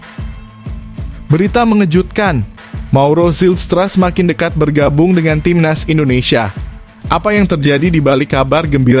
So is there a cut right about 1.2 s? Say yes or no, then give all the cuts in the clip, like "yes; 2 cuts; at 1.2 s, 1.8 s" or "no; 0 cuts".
yes; 1 cut; at 1.2 s